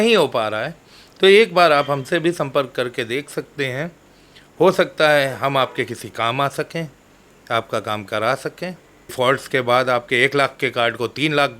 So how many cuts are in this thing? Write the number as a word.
one